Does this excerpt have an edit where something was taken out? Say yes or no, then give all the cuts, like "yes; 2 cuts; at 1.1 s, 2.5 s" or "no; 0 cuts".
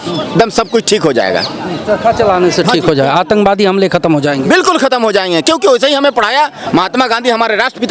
no; 0 cuts